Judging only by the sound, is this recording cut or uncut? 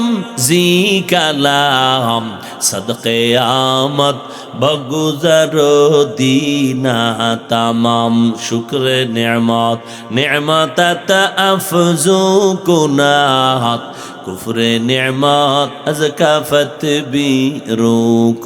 uncut